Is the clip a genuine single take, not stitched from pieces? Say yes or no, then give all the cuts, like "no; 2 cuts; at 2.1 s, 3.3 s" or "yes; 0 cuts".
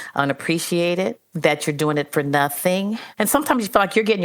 no; 2 cuts; at 1.3 s, 3.1 s